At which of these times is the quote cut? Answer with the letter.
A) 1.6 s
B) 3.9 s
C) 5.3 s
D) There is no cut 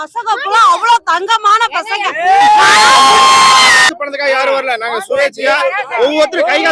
B